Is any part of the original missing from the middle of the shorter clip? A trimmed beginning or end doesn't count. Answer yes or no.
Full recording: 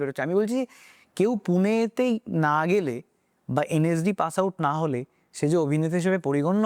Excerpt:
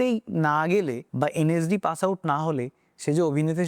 yes